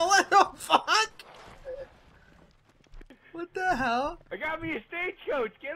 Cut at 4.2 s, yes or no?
yes